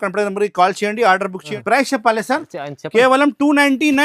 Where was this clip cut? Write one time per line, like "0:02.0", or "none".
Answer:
0:01.5